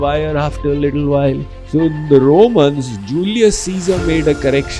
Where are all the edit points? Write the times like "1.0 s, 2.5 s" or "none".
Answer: 1.5 s

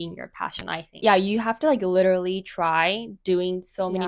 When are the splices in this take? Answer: 0.9 s

